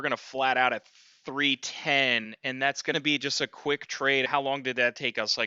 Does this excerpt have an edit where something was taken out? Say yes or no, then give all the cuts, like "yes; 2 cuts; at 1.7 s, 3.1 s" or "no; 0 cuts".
yes; 2 cuts; at 2.7 s, 4.3 s